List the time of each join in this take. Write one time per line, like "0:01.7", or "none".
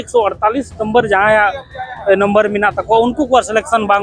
none

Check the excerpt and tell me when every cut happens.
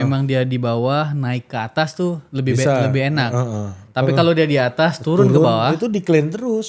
none

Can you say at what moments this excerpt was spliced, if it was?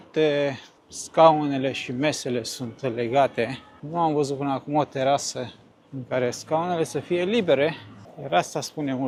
none

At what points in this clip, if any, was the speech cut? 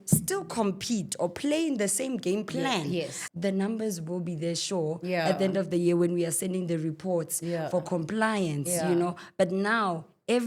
0:03.2

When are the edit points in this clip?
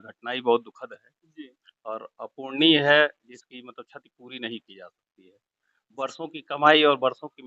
none

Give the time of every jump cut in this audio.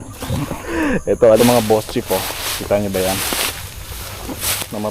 0:01.4

